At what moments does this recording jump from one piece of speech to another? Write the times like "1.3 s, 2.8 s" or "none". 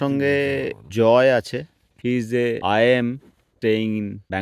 3.5 s